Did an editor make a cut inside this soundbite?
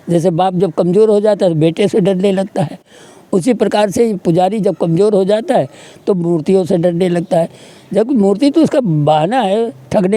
no; 0 cuts

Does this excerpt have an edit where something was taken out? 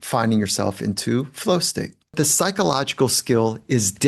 yes; 1 cut; at 2.1 s

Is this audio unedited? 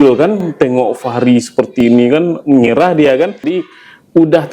no; 1 cut; at 3.5 s

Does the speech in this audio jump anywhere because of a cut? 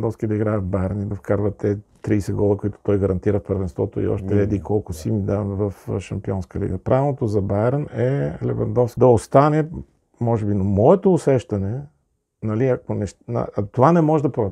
yes; 1 cut; at 8.9 s

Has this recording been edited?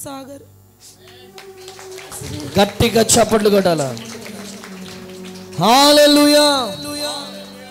no; 0 cuts

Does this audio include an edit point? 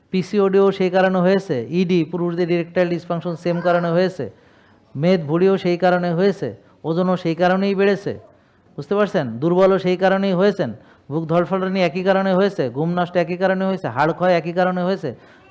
no; 0 cuts

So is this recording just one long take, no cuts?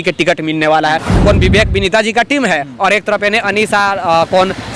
no; 1 cut; at 1.1 s

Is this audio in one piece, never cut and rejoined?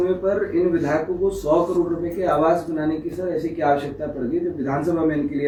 yes; 0 cuts

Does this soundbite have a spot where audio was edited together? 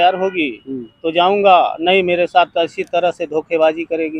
no; 0 cuts

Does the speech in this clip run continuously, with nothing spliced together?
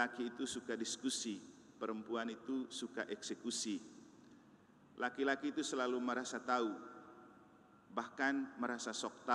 yes; 0 cuts

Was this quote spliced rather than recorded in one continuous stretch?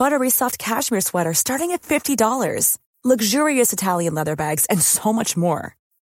no; 0 cuts

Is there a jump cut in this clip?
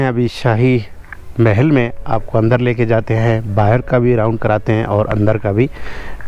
no; 0 cuts

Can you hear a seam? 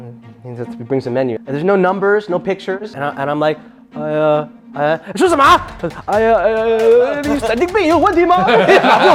no; 0 cuts

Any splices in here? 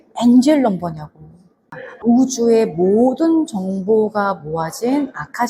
yes; 1 cut; at 2.0 s

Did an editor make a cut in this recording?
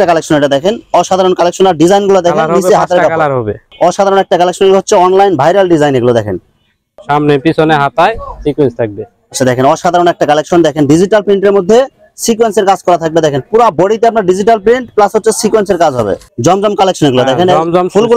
yes; 3 cuts; at 3.6 s, 6.9 s, 16.2 s

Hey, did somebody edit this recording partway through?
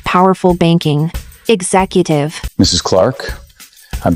yes; 1 cut; at 2.4 s

